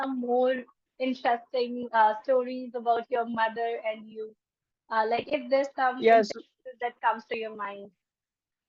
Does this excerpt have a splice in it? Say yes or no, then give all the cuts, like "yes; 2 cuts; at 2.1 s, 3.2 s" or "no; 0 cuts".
no; 0 cuts